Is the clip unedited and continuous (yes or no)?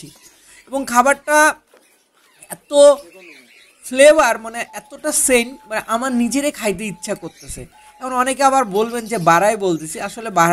yes